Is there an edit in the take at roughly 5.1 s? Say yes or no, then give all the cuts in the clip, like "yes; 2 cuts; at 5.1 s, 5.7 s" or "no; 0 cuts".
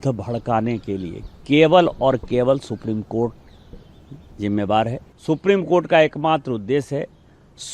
yes; 1 cut; at 5.1 s